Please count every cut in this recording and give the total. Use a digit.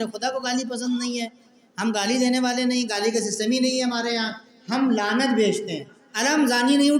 1